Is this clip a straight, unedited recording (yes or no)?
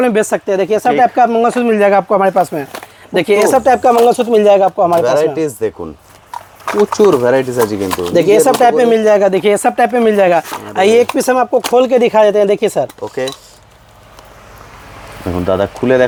yes